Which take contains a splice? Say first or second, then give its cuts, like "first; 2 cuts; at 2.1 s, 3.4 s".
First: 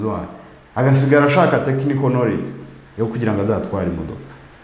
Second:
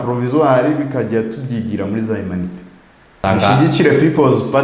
second; 1 cut; at 3.2 s